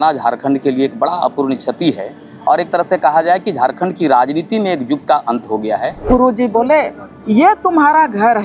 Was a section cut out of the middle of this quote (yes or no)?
yes